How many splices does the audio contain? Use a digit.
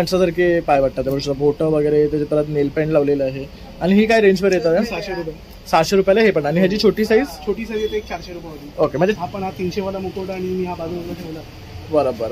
1